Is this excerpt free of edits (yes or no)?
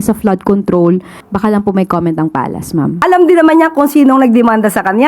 no